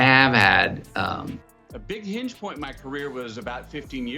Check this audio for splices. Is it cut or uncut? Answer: cut